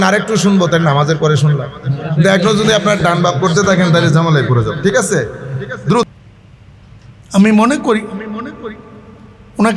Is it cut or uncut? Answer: cut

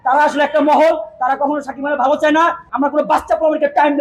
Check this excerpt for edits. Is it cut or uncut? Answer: cut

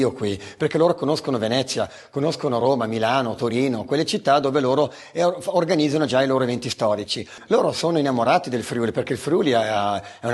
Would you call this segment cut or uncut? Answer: cut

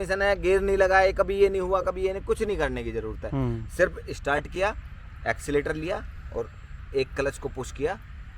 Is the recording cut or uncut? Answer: uncut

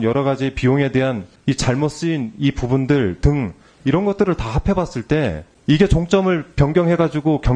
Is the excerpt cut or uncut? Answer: cut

